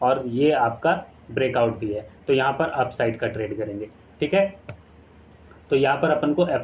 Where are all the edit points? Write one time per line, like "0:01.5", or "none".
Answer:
none

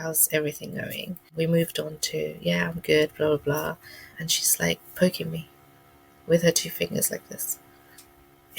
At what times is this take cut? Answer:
0:01.2
0:04.1

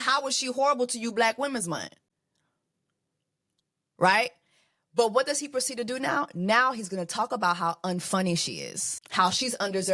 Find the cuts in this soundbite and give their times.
none

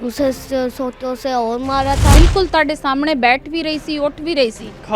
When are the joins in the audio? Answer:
0:02.2

